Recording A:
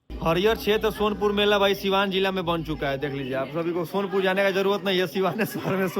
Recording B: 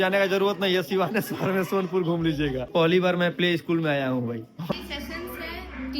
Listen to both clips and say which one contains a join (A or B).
B